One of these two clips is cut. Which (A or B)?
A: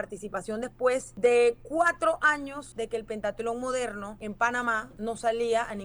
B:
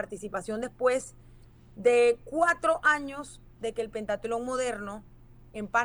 A